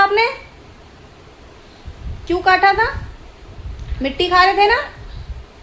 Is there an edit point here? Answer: no; 0 cuts

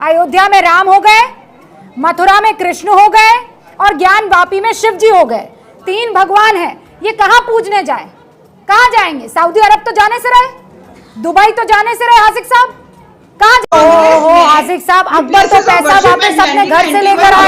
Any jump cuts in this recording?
yes; 1 cut; at 13.6 s

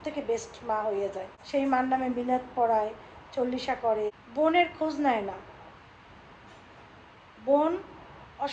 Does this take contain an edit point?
yes; 2 cuts; at 1.3 s, 4.2 s

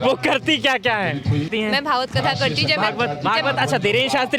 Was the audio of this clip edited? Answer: yes; 1 cut; at 1.5 s

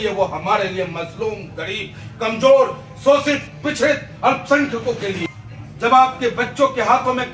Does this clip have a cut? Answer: yes; 1 cut; at 5.4 s

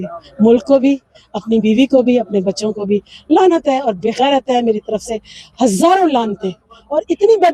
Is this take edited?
no; 0 cuts

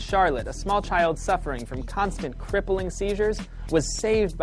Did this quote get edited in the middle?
no; 0 cuts

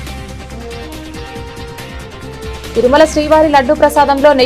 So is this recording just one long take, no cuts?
no; 1 cut; at 2.7 s

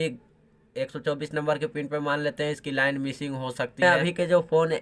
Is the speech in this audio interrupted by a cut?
yes; 1 cut; at 3.8 s

